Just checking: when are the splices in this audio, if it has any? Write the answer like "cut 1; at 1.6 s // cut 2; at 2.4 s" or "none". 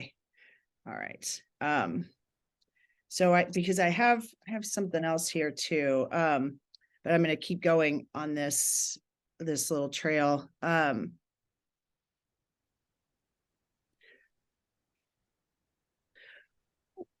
none